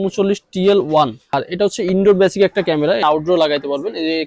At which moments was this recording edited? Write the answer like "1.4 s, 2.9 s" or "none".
1.3 s, 3.0 s